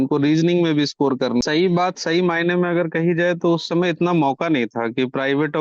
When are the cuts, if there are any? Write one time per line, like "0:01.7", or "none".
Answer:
0:01.4